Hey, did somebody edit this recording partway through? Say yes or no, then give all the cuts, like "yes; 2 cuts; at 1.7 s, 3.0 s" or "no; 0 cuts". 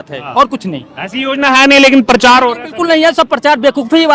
no; 0 cuts